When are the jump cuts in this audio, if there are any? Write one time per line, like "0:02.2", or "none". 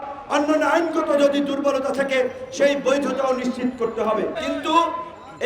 0:04.4